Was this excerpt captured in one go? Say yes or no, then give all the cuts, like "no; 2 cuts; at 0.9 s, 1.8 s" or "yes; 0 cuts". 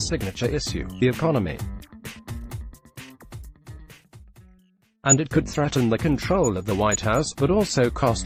yes; 0 cuts